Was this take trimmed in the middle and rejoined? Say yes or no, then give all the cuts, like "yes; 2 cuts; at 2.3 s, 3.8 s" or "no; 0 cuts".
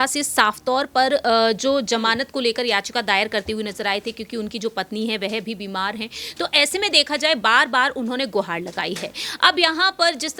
no; 0 cuts